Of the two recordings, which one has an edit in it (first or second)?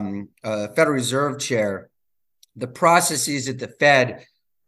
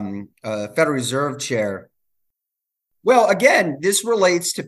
second